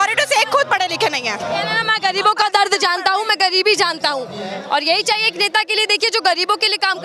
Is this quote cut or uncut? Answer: uncut